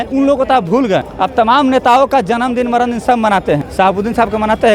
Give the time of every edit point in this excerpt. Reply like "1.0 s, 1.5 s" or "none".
1.1 s, 3.7 s